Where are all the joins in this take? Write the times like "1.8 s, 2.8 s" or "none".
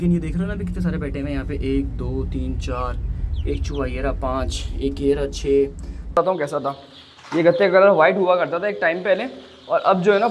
6.2 s